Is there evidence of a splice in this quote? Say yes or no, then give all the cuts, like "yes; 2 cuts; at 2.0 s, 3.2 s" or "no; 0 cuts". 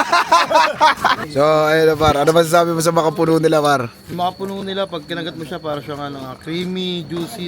yes; 1 cut; at 1.2 s